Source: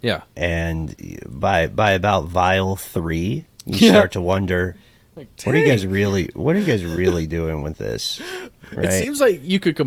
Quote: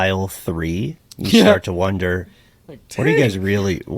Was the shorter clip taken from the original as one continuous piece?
yes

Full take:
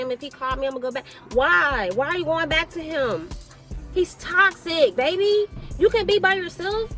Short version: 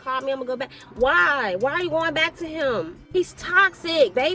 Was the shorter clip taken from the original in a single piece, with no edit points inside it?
no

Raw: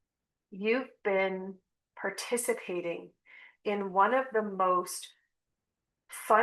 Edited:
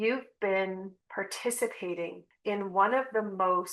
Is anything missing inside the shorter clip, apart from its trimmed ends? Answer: yes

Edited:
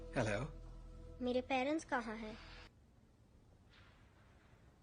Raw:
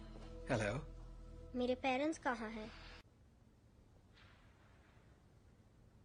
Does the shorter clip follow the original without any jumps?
no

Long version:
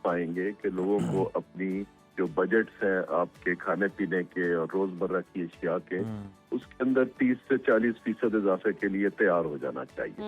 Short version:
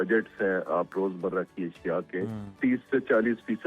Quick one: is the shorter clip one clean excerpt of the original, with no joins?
no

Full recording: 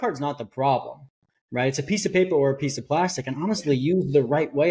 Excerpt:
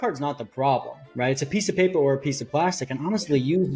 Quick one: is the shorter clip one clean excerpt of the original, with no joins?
no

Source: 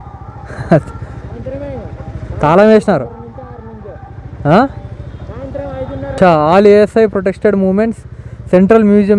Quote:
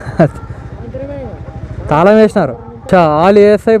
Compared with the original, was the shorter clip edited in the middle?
yes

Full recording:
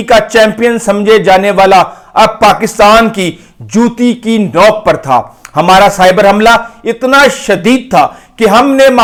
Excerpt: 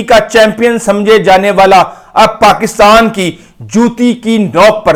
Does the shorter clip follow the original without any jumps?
yes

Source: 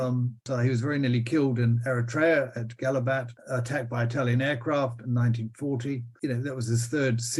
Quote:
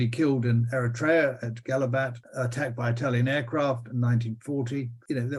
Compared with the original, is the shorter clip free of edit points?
yes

